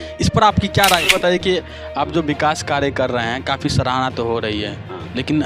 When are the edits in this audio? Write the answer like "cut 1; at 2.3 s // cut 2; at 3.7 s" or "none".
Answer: cut 1; at 1.1 s